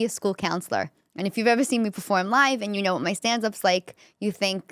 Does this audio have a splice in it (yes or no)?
no